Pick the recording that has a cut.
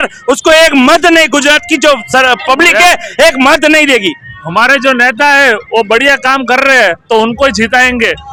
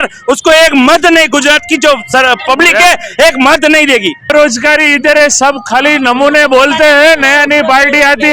second; 1 cut; at 4.3 s

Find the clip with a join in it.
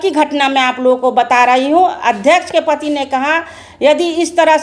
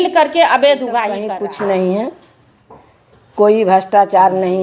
second; 1 cut; at 1.3 s

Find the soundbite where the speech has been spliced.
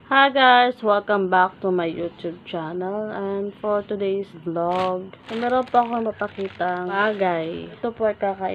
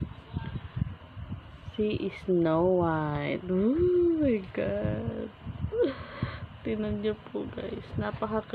first; 4 cuts; at 4.3 s, 5.2 s, 6.9 s, 7.8 s

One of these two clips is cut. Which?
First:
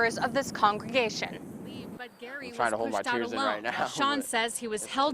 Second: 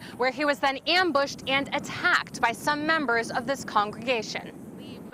first; 1 cut; at 3.9 s

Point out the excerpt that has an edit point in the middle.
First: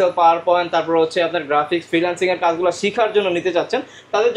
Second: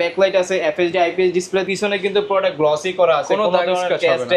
second; 1 cut; at 1.6 s

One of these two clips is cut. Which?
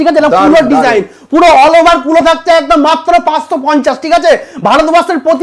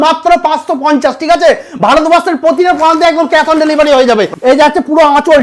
second; 1 cut; at 4.3 s

